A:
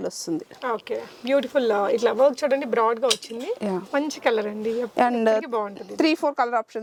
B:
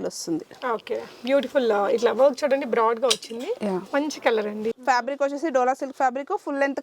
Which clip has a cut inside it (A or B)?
B